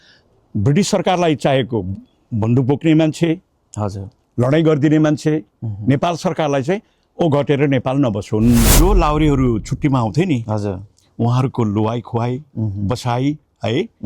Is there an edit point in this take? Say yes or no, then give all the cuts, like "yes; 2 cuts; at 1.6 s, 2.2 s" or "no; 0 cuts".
yes; 1 cut; at 8.7 s